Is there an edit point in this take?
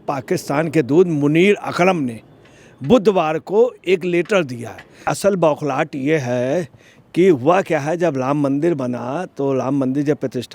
yes; 1 cut; at 5.1 s

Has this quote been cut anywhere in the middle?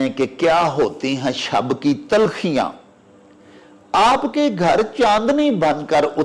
no; 0 cuts

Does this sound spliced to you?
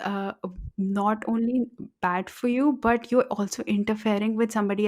no; 0 cuts

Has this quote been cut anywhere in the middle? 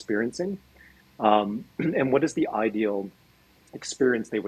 no; 0 cuts

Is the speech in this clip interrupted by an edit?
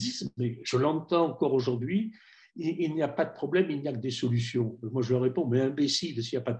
no; 0 cuts

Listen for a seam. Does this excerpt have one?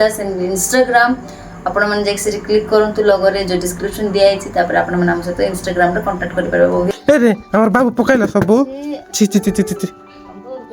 yes; 1 cut; at 7.0 s

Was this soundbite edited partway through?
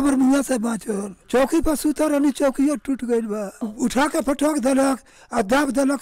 yes; 1 cut; at 3.6 s

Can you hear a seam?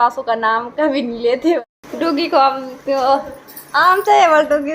yes; 1 cut; at 1.6 s

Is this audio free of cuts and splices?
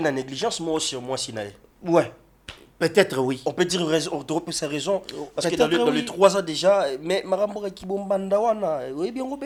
yes; 0 cuts

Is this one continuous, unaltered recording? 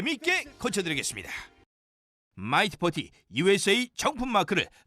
no; 1 cut; at 1.6 s

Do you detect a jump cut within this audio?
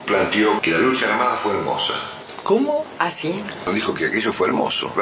no; 0 cuts

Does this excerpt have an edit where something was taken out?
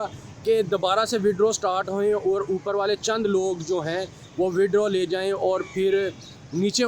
no; 0 cuts

